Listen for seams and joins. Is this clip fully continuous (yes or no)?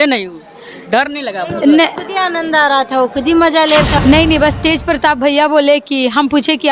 no